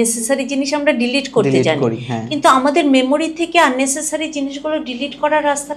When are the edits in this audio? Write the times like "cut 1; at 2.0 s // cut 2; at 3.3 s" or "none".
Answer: none